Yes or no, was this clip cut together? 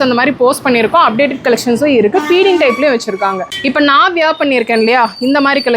yes